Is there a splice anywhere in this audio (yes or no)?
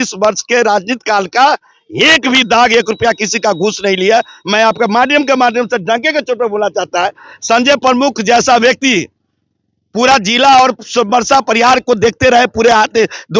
no